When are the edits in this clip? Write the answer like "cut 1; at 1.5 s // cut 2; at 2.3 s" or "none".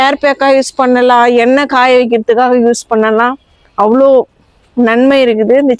none

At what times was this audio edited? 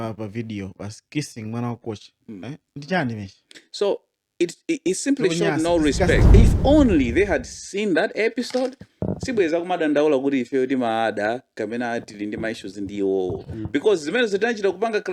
cut 1; at 6.2 s

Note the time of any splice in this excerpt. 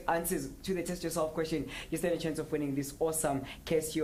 none

